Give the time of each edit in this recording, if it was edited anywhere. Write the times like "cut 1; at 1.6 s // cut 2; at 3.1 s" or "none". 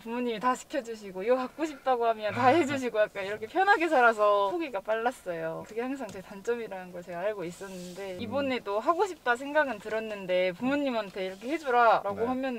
none